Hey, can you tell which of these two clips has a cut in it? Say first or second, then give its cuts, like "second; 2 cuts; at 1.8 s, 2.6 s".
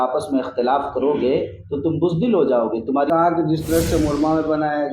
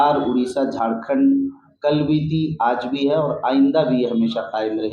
first; 1 cut; at 3.1 s